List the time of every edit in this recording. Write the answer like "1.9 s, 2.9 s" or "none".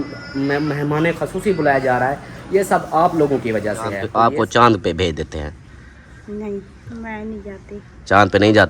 4.0 s